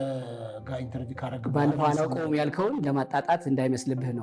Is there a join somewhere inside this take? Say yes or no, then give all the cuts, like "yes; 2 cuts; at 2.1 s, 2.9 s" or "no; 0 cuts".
no; 0 cuts